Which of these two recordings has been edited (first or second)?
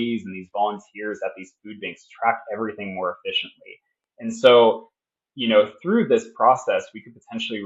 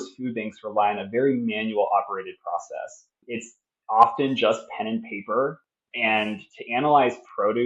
second